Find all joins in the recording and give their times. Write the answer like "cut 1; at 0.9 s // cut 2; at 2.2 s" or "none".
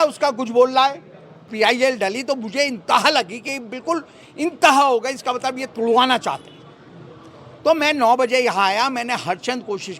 cut 1; at 1.5 s